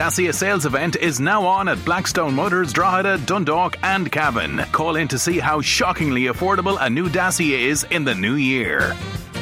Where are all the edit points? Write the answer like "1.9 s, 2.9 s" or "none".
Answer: none